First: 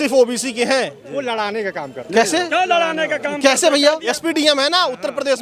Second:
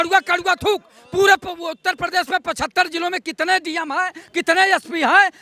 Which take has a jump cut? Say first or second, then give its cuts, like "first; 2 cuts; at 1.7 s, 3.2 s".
first; 1 cut; at 4.1 s